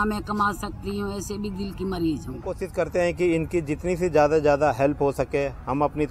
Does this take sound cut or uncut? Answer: cut